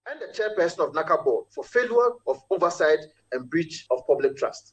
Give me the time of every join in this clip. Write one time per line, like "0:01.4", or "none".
0:01.5
0:03.8